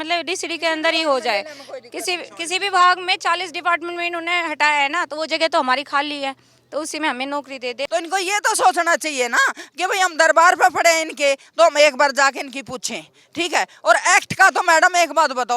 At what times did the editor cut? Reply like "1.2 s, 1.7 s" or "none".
7.8 s